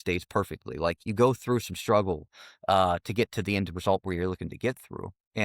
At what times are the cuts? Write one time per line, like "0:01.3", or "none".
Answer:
0:01.0

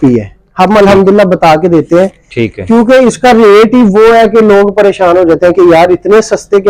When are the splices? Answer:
none

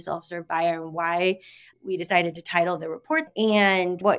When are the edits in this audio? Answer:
0:03.2

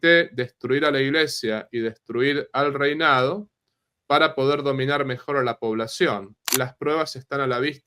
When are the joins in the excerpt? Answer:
0:06.5

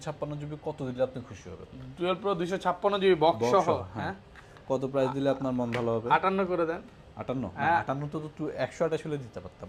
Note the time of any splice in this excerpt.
none

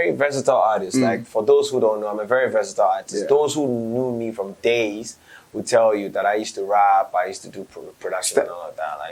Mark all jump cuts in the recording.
none

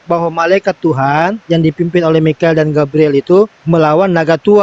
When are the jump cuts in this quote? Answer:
0:03.6

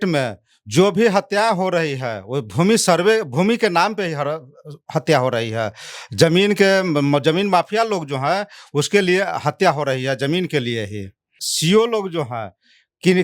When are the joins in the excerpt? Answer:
0:11.4

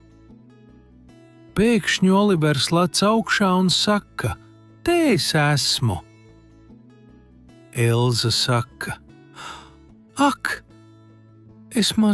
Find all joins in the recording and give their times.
none

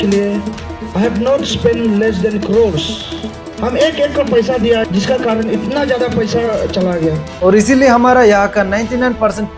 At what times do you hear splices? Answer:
0:07.3

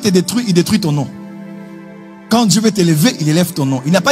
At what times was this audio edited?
none

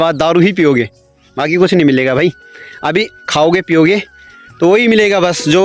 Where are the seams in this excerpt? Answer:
none

